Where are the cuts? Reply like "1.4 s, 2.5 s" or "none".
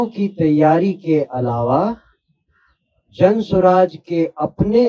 none